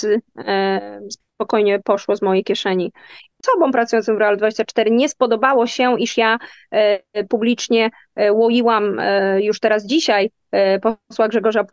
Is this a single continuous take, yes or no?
no